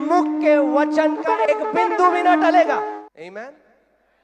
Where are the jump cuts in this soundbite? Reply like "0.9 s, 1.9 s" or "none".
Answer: 2.9 s